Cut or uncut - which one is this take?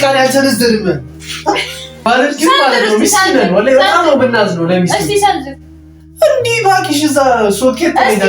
cut